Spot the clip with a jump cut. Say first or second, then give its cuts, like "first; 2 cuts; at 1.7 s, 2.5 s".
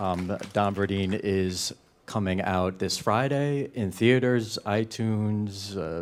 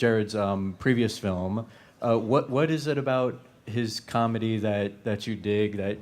second; 1 cut; at 4.6 s